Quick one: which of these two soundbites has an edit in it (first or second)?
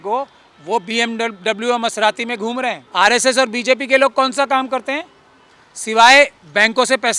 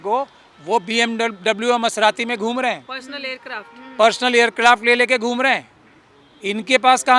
first